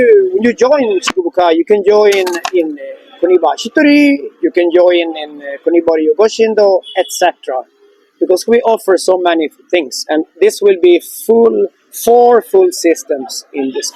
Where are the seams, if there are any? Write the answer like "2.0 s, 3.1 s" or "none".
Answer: none